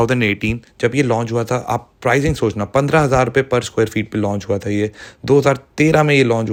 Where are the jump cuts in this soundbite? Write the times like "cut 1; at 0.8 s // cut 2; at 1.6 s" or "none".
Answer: none